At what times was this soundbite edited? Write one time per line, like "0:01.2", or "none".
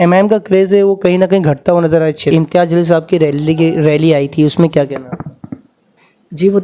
0:02.3